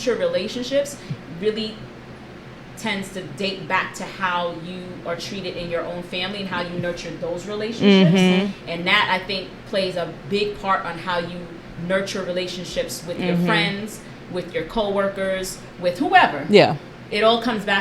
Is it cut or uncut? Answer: uncut